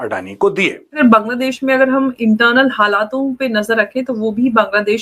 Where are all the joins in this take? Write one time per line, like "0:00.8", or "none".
0:00.9